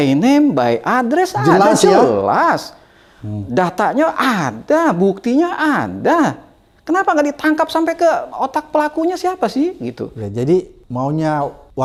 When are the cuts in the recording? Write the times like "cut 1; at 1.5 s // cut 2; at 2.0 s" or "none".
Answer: none